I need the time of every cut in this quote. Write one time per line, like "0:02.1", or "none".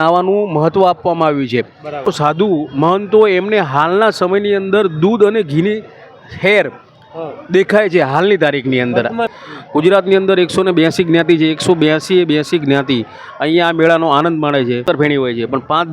0:02.1
0:09.3
0:14.8

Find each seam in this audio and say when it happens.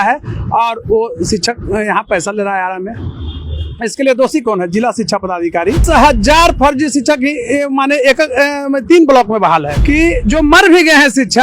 0:05.8
0:09.7

